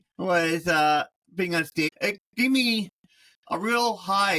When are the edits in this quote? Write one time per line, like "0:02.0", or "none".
0:01.9